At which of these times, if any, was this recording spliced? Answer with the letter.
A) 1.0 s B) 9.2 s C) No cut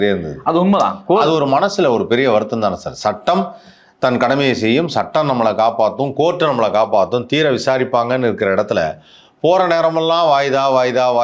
C